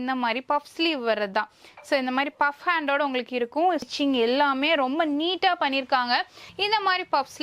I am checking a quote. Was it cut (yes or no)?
yes